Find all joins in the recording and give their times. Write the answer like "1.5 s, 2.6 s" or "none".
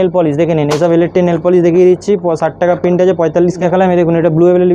3.6 s

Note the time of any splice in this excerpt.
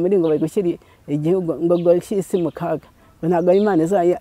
none

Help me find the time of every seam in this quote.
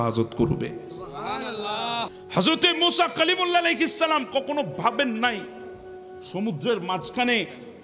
2.2 s

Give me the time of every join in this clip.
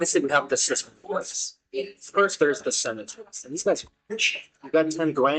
none

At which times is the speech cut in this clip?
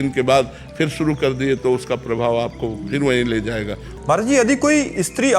3.8 s

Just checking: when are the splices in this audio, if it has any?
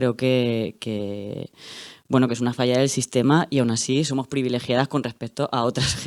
none

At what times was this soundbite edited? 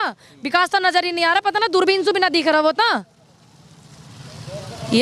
none

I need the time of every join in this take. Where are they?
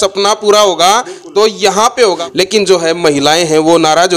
2.2 s

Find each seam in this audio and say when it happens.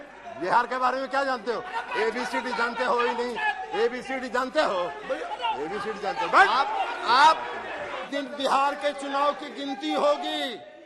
8.1 s

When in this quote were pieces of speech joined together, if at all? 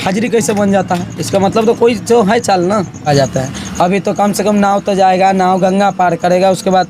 3.1 s

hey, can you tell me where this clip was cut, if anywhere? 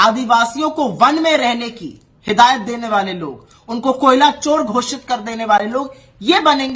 none

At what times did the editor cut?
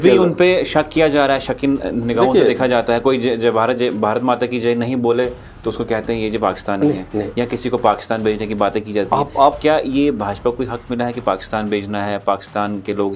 none

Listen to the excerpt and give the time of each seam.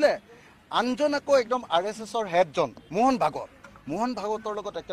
2.8 s

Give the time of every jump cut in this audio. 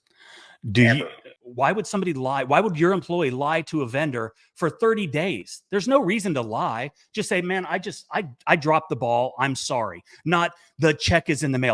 1.2 s

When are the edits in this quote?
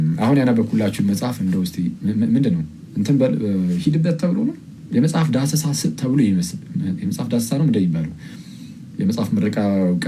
4.7 s

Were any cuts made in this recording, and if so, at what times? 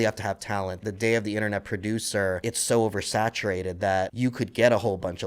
0.8 s, 2.4 s, 4.1 s

